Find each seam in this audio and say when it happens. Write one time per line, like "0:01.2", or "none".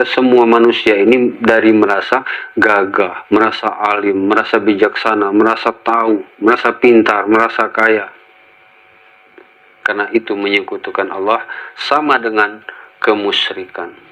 none